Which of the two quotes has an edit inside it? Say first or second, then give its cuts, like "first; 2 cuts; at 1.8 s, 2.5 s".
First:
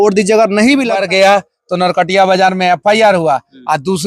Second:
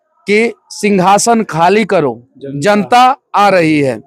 first; 1 cut; at 0.9 s